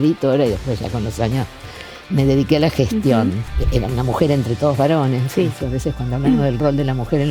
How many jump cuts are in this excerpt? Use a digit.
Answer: 1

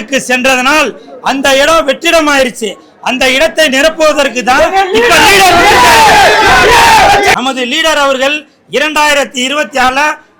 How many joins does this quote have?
1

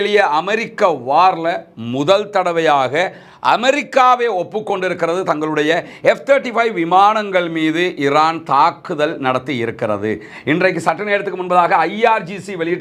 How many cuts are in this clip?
0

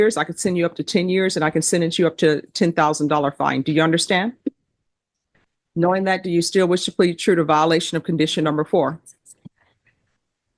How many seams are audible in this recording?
0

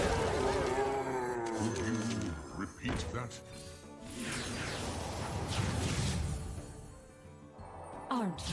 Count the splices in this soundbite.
0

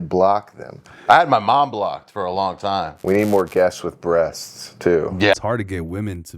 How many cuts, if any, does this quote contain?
2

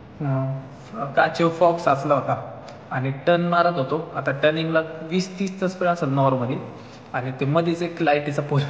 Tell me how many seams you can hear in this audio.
0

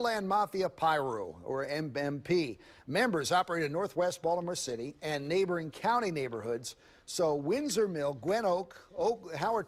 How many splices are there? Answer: 0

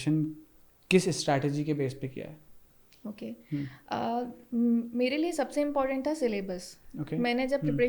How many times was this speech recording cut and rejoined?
0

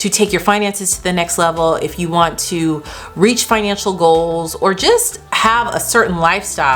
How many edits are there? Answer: 0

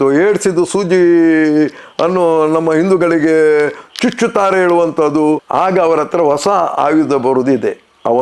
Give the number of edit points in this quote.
1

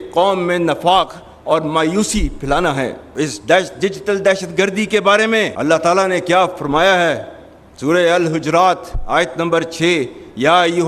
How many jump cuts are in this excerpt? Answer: 2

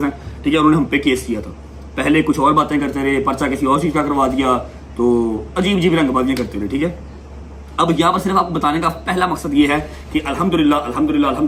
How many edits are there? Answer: 0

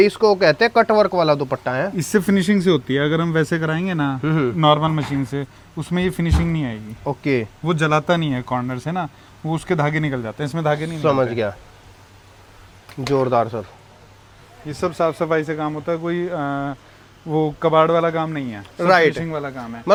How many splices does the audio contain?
0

